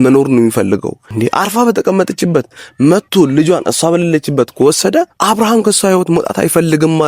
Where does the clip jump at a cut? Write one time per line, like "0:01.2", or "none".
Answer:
0:01.0
0:05.2